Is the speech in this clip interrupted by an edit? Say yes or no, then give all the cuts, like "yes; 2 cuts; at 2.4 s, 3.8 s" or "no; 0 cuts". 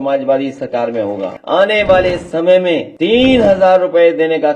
yes; 1 cut; at 1.3 s